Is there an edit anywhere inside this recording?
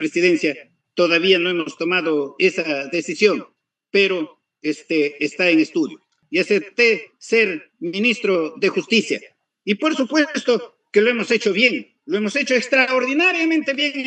yes; 1 cut; at 6.1 s

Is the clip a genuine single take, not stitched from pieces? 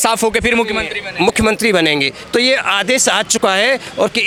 yes; 0 cuts

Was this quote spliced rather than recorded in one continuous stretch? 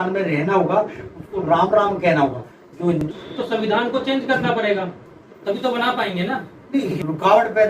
yes; 2 cuts; at 3.0 s, 6.9 s

